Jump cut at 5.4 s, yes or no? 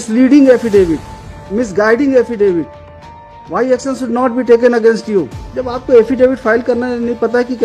yes